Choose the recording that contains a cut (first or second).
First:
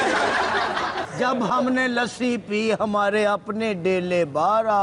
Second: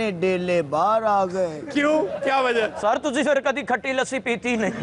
first